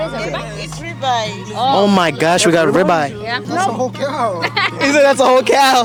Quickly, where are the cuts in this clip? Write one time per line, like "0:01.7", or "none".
none